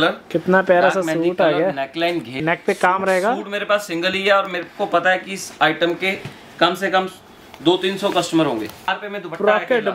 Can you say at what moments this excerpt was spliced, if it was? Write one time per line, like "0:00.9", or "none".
0:02.4
0:08.9